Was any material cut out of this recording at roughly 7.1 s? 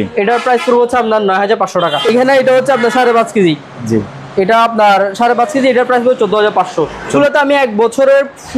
yes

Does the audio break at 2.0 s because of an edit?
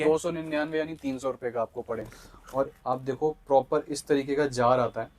yes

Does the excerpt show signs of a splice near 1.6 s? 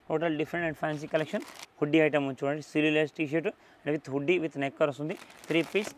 yes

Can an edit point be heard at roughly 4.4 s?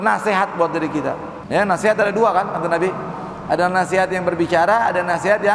no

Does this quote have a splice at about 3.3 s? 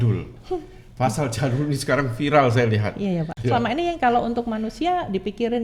yes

